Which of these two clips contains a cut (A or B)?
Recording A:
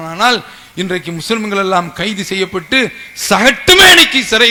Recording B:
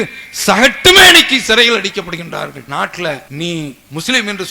B